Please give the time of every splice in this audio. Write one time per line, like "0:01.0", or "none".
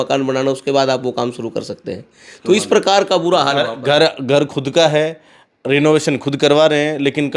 none